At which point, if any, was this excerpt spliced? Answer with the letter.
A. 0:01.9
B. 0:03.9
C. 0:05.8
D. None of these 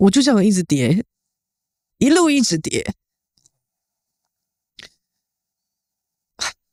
D